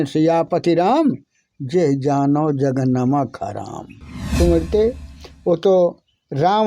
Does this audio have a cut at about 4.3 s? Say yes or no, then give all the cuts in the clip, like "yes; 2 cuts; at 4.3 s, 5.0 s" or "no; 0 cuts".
yes; 1 cut; at 4.3 s